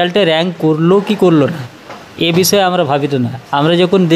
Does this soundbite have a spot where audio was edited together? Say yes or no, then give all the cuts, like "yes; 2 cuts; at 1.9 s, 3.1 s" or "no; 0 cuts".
no; 0 cuts